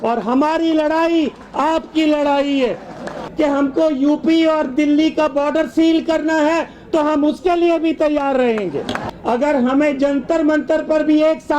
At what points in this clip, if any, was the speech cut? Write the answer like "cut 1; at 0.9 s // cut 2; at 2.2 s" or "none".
cut 1; at 3.2 s // cut 2; at 9.1 s